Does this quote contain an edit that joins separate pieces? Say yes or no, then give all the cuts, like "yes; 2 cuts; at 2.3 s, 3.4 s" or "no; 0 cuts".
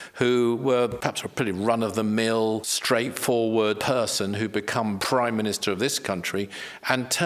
yes; 4 cuts; at 1.0 s, 2.7 s, 3.8 s, 5.0 s